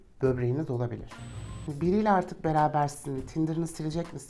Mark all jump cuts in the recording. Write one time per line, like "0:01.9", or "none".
0:01.2